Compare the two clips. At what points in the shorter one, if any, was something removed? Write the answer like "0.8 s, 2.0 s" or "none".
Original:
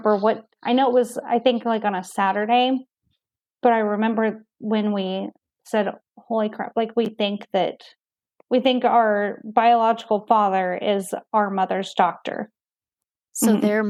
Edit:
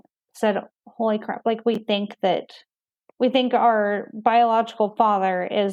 none